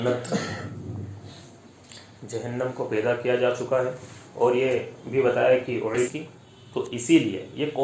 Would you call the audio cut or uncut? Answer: cut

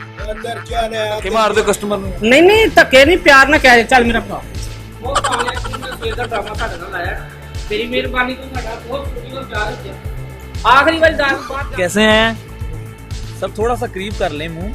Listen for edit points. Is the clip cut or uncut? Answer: cut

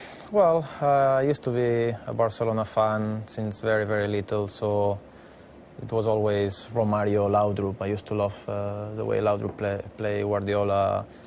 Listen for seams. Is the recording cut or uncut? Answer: cut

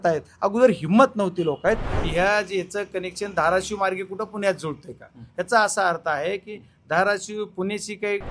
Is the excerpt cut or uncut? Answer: cut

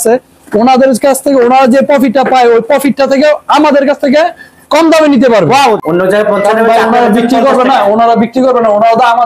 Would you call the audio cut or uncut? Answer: cut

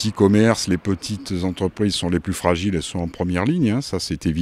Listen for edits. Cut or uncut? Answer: uncut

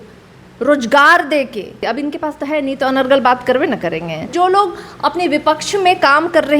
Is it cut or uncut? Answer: cut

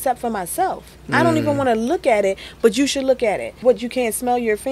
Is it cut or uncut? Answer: cut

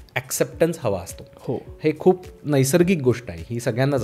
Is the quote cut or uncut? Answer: uncut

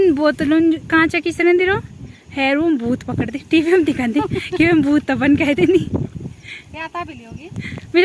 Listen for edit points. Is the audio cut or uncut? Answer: uncut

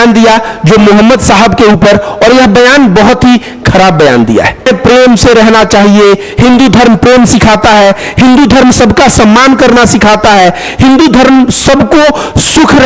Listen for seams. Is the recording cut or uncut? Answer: cut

